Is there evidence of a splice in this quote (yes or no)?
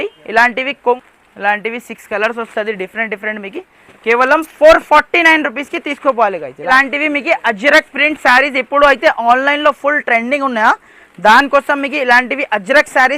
yes